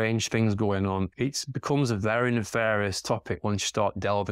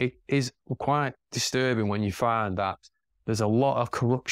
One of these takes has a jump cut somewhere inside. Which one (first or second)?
first